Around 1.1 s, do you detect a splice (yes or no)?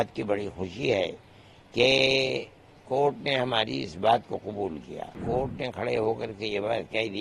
no